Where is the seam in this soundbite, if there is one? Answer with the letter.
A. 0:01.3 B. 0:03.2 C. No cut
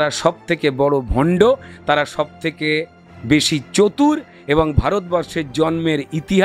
C